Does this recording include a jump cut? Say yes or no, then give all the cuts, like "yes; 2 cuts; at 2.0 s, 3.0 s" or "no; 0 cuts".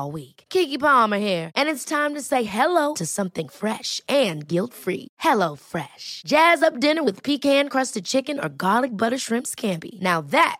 no; 0 cuts